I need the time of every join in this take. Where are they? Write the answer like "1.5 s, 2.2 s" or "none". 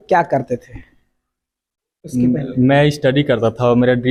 none